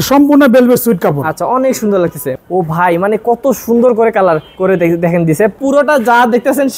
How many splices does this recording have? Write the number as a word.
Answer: three